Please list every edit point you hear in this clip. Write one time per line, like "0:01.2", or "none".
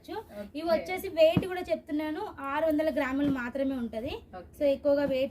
none

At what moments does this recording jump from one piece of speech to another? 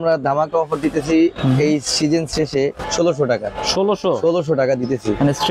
0:02.8

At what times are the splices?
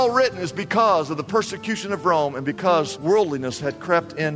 0:02.9

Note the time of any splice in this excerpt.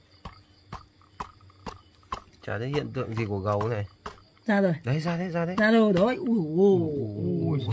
none

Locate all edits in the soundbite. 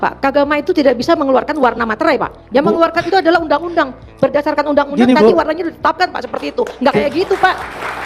none

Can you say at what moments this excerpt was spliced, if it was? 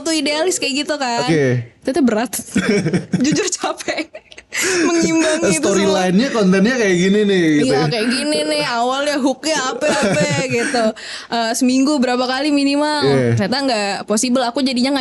none

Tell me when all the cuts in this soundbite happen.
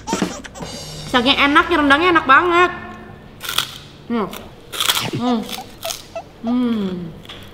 0:04.4

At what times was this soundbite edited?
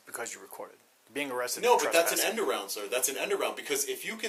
none

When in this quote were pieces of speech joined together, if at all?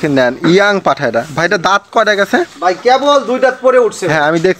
none

